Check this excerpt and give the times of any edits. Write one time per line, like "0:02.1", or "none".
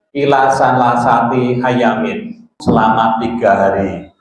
0:02.6